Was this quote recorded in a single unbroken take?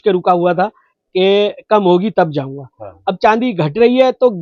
yes; 0 cuts

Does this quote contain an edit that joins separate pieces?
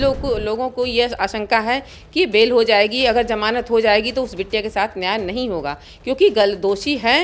no; 0 cuts

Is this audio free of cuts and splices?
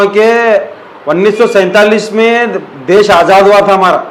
yes; 0 cuts

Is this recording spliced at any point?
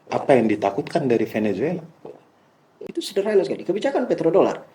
yes; 1 cut; at 2.8 s

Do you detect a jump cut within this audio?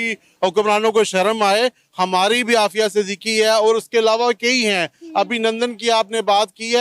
no; 0 cuts

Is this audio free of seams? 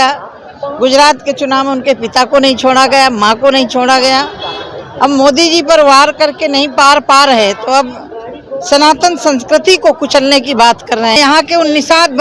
no; 1 cut; at 11.2 s

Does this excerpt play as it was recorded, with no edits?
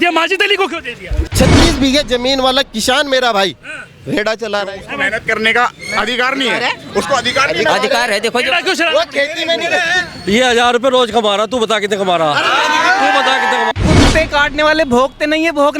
no; 2 cuts; at 1.2 s, 13.8 s

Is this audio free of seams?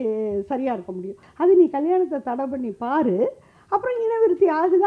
no; 1 cut; at 1.2 s

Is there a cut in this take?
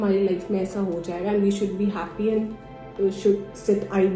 no; 0 cuts

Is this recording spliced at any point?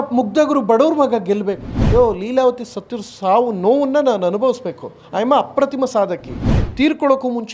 no; 0 cuts

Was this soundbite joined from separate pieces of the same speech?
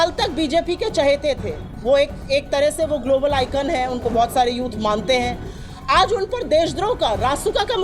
no; 0 cuts

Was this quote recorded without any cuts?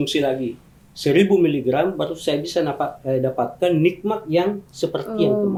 yes; 0 cuts

